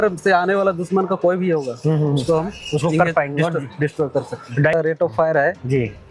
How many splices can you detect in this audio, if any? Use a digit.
1